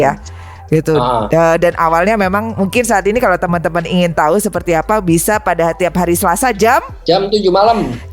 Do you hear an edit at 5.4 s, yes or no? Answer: no